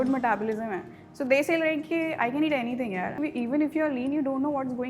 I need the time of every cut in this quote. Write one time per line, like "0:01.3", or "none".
0:03.2